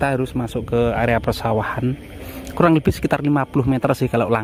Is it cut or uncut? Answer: uncut